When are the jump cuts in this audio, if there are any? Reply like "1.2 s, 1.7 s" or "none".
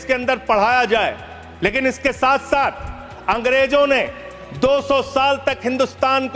none